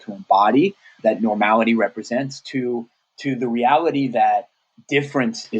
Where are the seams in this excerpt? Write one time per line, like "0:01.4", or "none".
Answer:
0:01.0
0:04.7